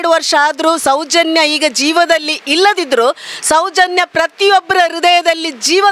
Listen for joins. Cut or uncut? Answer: uncut